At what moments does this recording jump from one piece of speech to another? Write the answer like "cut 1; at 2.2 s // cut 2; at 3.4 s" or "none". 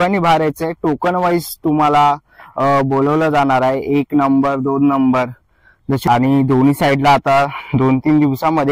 cut 1; at 6.0 s

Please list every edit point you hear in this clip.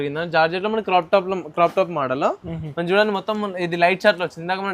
none

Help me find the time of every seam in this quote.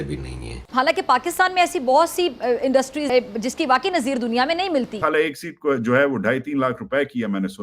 cut 1; at 3.1 s // cut 2; at 5.0 s

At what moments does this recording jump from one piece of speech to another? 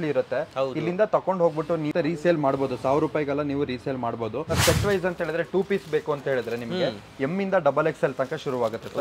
cut 1; at 1.9 s // cut 2; at 4.5 s

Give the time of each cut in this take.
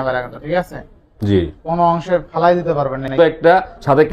cut 1; at 3.2 s

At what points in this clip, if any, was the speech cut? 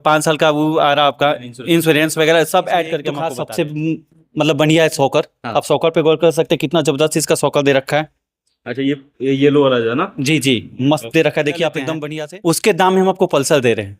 cut 1; at 3.1 s // cut 2; at 12.0 s

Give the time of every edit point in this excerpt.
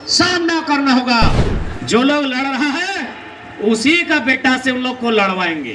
cut 1; at 1.2 s

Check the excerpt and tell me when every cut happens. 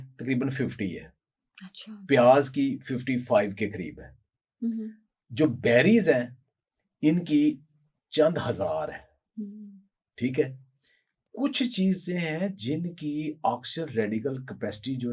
none

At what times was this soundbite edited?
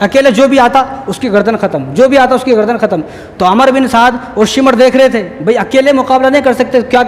none

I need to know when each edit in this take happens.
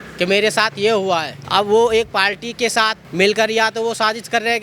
cut 1; at 1.4 s // cut 2; at 3.0 s

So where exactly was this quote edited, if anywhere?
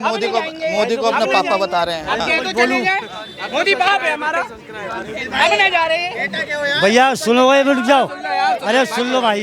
none

